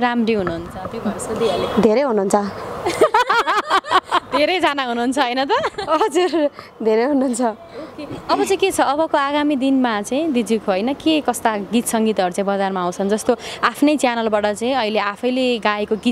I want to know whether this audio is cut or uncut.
uncut